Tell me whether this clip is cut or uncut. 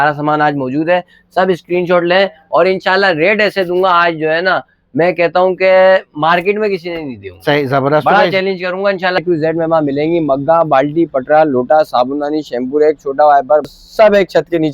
cut